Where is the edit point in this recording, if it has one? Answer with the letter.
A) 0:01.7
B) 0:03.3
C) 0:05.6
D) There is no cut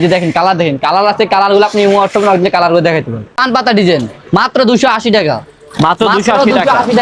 B